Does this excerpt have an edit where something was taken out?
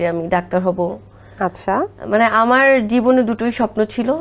no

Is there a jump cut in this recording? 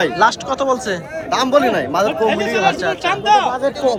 no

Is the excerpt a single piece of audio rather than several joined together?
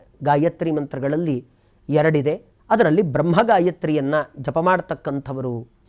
no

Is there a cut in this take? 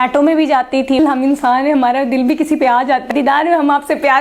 yes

